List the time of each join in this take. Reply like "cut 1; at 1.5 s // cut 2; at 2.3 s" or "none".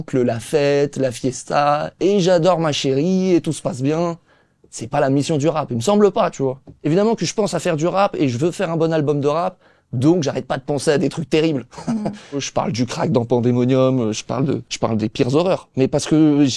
cut 1; at 6.7 s // cut 2; at 12.4 s // cut 3; at 14.7 s